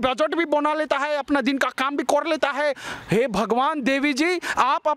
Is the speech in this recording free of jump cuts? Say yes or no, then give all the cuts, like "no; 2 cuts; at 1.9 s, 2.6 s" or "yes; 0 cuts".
yes; 0 cuts